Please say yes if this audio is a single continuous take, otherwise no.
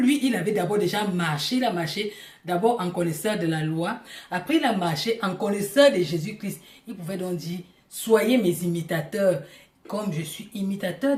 yes